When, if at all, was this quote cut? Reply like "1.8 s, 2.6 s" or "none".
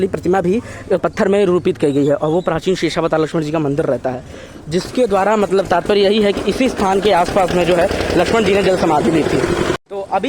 none